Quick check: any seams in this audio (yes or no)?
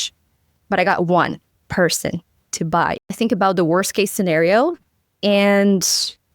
yes